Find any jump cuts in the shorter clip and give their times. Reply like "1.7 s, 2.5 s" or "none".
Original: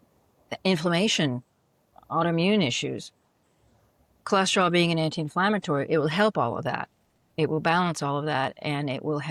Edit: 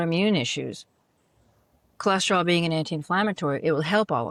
none